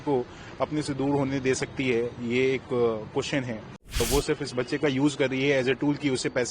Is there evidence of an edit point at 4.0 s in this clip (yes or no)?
yes